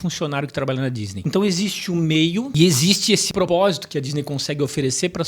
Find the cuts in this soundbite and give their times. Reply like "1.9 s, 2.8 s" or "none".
1.1 s, 2.5 s, 3.4 s